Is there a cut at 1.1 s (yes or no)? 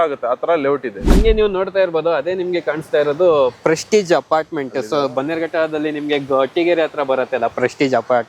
yes